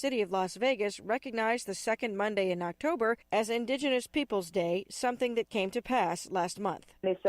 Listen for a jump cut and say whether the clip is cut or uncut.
cut